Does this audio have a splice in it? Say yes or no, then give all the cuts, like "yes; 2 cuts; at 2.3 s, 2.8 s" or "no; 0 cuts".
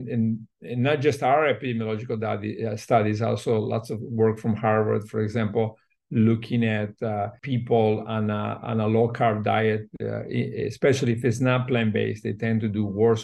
yes; 1 cut; at 7.4 s